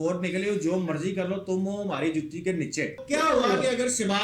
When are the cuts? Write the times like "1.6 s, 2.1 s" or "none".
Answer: 3.0 s